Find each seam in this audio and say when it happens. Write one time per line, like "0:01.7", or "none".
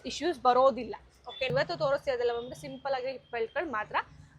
0:01.5